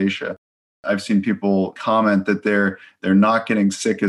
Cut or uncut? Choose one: cut